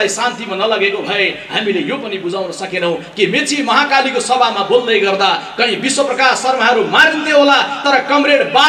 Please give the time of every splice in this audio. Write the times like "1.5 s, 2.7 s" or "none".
none